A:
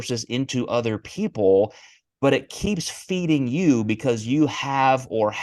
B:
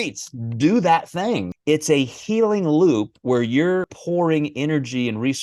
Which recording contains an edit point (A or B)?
B